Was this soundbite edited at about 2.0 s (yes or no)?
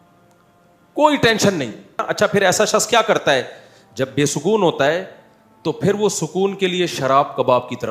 yes